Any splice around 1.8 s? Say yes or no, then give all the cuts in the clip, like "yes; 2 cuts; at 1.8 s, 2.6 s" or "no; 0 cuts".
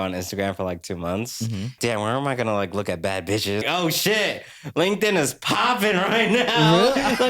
yes; 2 cuts; at 1.8 s, 3.6 s